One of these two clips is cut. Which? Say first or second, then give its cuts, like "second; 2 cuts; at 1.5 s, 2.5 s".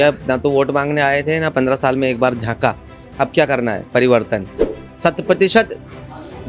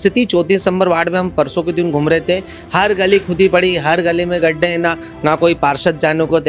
first; 1 cut; at 4.8 s